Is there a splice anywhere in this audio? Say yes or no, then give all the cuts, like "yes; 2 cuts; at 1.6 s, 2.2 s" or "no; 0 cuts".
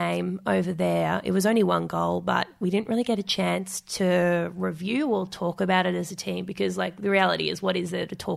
no; 0 cuts